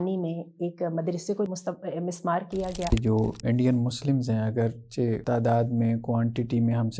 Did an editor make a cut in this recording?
yes; 3 cuts; at 1.5 s, 2.9 s, 5.2 s

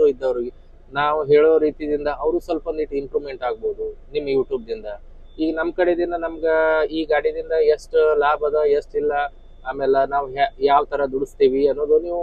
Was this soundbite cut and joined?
no; 0 cuts

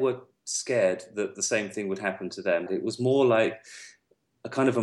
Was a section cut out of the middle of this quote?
yes; 1 cut; at 2.7 s

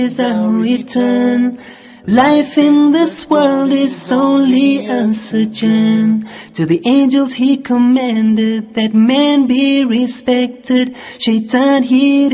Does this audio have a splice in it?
no; 0 cuts

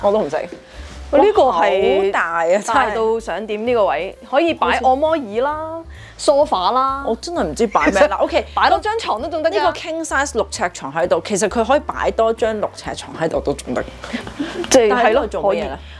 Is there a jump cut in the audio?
no; 0 cuts

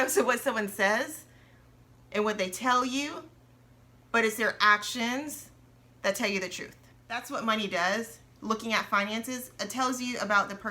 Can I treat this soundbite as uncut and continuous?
no; 1 cut; at 7.2 s

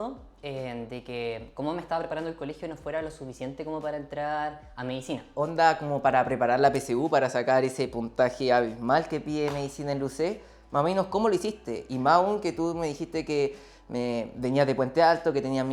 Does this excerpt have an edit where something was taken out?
yes; 1 cut; at 5.3 s

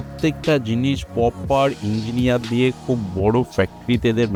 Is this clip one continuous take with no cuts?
yes; 0 cuts

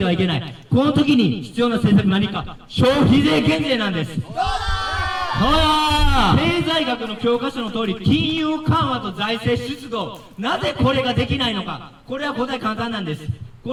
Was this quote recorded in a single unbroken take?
yes; 0 cuts

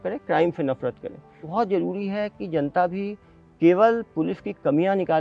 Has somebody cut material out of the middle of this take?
yes; 1 cut; at 1.4 s

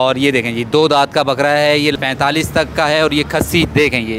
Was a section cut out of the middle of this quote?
yes; 1 cut; at 1.9 s

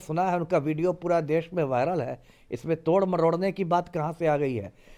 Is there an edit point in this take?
no; 0 cuts

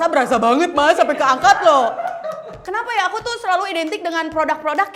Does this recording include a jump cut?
yes; 1 cut; at 2.5 s

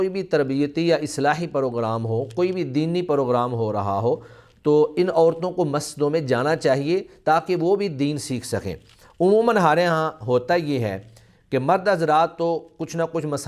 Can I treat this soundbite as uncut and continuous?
yes; 0 cuts

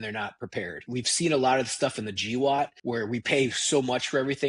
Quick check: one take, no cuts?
no; 2 cuts; at 0.8 s, 2.8 s

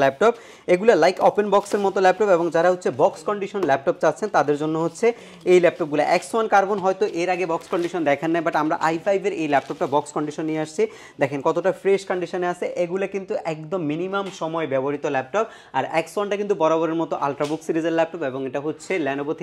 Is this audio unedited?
yes; 0 cuts

